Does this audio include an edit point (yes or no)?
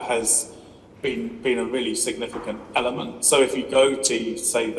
no